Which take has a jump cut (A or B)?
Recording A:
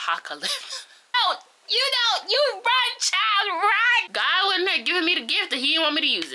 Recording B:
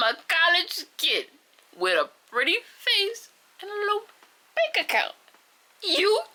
A